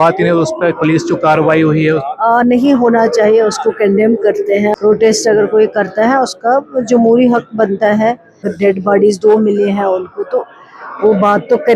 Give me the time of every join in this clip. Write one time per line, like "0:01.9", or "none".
0:04.8
0:08.5